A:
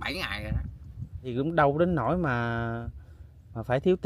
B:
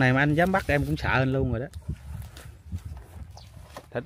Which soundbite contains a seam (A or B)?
A